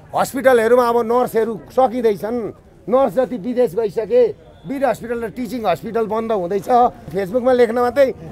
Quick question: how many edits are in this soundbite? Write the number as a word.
one